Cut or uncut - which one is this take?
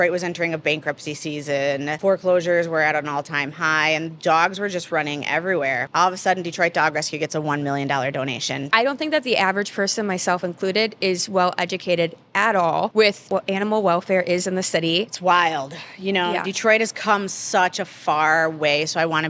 cut